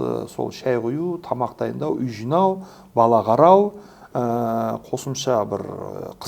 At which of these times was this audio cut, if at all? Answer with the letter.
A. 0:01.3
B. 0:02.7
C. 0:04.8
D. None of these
D